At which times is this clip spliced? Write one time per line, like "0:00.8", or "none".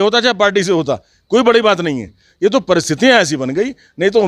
none